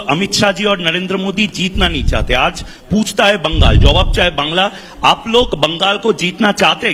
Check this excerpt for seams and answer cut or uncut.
uncut